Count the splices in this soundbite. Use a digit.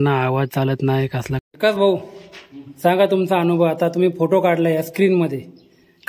1